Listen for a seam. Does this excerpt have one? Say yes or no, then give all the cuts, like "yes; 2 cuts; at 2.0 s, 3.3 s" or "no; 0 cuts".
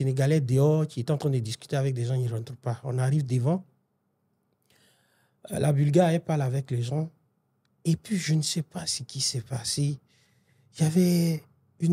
no; 0 cuts